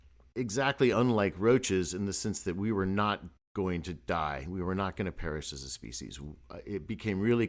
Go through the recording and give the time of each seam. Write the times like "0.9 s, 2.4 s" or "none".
none